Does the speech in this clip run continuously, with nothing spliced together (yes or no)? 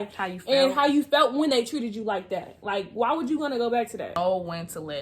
no